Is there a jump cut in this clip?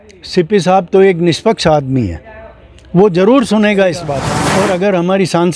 yes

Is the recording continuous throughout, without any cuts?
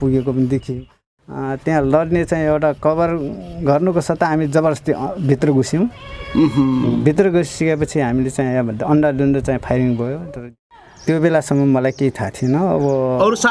no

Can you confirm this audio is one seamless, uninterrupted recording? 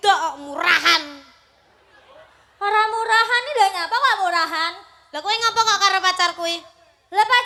yes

